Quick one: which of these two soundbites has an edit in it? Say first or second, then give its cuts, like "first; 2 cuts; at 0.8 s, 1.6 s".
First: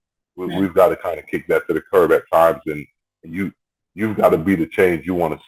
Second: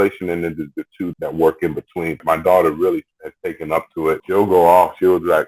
second; 3 cuts; at 1.1 s, 2.2 s, 4.2 s